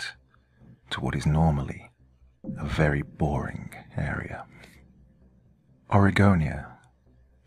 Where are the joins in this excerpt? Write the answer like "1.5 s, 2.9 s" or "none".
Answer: none